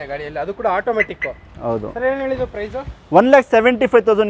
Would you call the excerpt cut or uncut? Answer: uncut